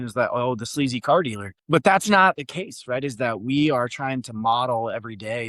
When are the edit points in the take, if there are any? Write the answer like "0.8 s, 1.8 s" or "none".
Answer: 1.5 s